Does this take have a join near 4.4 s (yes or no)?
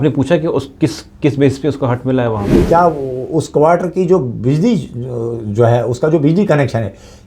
no